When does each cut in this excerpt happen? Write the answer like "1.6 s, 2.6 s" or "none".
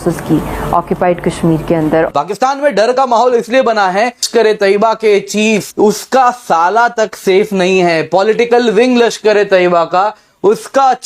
2.1 s, 4.3 s, 5.7 s